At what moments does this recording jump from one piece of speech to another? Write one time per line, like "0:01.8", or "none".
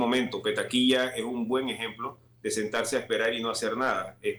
none